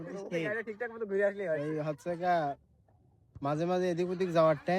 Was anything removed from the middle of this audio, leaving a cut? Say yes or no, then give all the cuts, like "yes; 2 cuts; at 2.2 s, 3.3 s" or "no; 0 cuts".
no; 0 cuts